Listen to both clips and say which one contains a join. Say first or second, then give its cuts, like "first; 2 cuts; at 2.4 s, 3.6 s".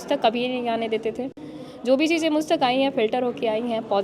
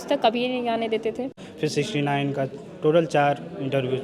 second; 1 cut; at 1.4 s